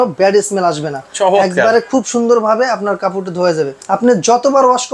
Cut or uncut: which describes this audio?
cut